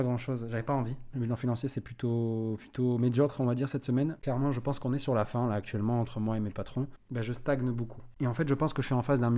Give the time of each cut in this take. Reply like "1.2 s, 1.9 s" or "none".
1.2 s, 4.2 s, 7.0 s